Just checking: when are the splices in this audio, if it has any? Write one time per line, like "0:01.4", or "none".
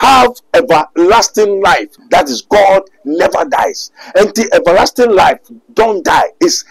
0:01.9